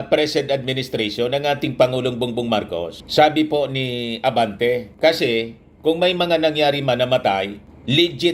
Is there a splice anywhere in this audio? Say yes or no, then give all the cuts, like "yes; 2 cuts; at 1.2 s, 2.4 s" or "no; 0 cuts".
no; 0 cuts